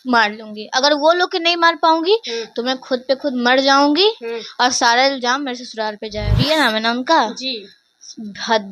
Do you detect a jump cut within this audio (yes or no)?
yes